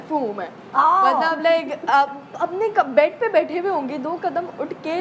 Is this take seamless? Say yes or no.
yes